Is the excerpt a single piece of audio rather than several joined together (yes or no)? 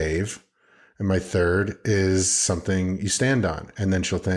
yes